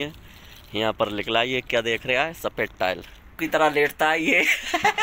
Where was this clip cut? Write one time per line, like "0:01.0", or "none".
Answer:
0:03.4